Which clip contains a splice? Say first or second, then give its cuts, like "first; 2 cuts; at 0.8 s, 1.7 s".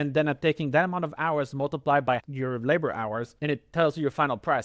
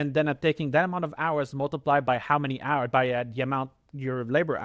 first; 2 cuts; at 2.2 s, 3.3 s